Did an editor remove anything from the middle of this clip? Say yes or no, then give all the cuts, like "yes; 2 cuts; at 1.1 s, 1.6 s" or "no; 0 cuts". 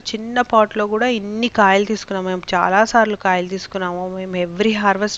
no; 0 cuts